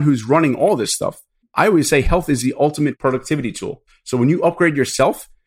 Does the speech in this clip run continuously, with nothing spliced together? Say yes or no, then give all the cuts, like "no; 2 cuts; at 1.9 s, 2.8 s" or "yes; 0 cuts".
no; 3 cuts; at 1.5 s, 3.0 s, 3.9 s